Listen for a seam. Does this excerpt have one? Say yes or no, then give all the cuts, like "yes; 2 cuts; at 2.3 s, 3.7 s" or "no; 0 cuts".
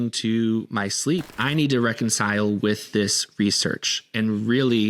yes; 1 cut; at 1.3 s